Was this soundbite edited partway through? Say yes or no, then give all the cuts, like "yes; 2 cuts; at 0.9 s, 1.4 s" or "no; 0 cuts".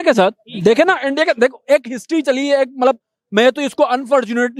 no; 0 cuts